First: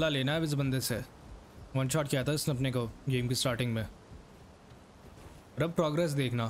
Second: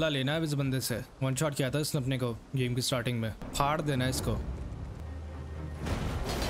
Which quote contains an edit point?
second; 3 cuts; at 1.1 s, 3.5 s, 5.0 s

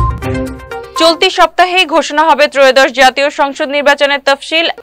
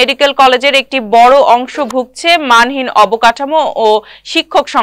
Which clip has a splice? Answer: first; 1 cut; at 1.0 s

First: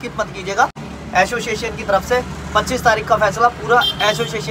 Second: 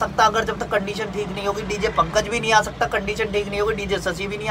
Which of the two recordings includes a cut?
first; 1 cut; at 0.9 s

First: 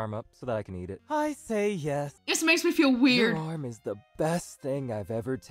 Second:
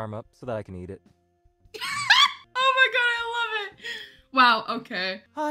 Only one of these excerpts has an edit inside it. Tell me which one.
first; 2 cuts; at 1.0 s, 2.2 s

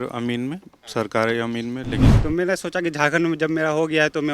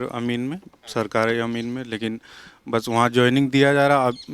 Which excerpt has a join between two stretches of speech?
first; 1 cut; at 2.1 s

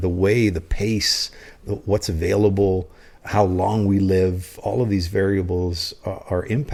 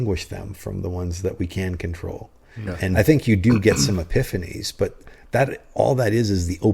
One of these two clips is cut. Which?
second; 1 cut; at 3.0 s

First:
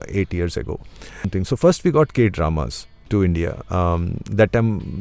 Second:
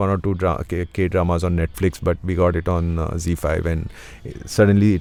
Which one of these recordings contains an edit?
first; 1 cut; at 1.3 s

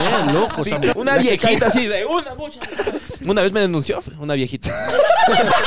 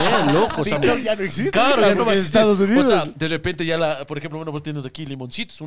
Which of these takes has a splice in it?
first; 1 cut; at 1.0 s

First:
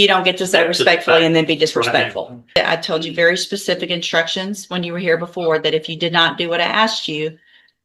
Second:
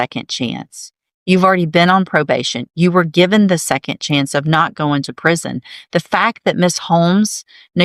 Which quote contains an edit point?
first; 1 cut; at 2.6 s

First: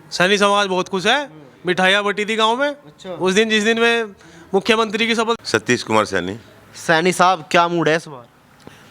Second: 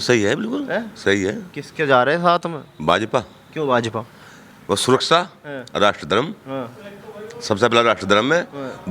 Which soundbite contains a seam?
first; 1 cut; at 5.4 s

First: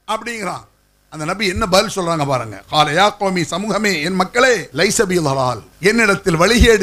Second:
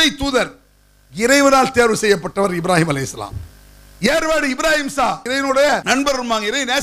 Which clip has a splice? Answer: first; 2 cuts; at 4.7 s, 5.7 s

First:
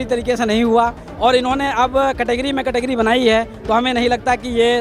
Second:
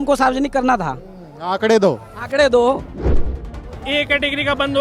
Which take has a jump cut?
second; 1 cut; at 3.1 s

